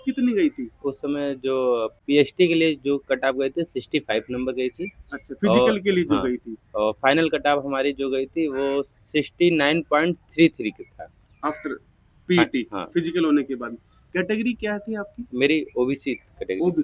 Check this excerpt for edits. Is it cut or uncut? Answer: uncut